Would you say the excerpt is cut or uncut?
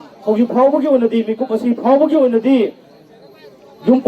uncut